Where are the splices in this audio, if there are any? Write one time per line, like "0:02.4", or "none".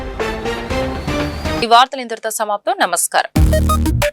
none

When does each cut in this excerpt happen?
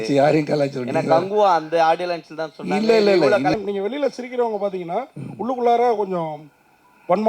0:03.6

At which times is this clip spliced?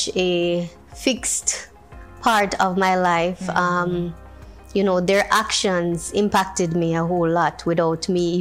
none

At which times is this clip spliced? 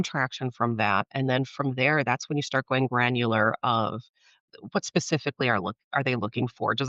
0:04.3

